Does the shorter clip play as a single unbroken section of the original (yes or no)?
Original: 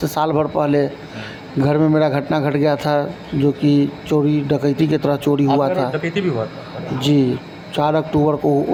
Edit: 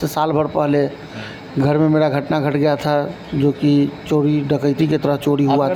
yes